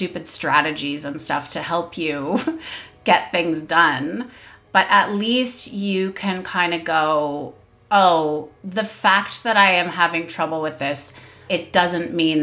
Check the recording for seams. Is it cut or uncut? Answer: cut